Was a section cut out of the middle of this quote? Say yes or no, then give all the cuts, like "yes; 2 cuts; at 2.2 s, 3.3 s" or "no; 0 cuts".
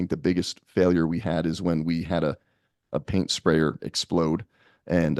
no; 0 cuts